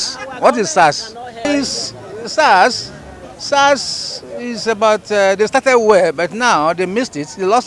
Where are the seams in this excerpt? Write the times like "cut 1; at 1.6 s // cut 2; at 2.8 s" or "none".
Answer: cut 1; at 1.4 s